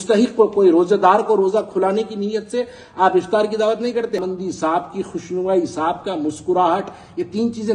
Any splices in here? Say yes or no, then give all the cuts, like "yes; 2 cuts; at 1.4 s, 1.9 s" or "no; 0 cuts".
yes; 1 cut; at 4.2 s